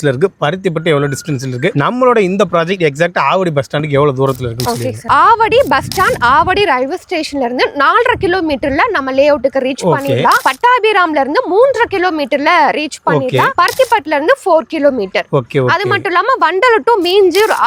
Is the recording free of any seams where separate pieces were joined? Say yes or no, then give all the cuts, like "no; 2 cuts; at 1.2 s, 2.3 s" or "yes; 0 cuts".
yes; 0 cuts